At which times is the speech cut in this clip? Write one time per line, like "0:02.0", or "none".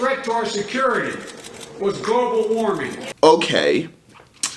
0:02.9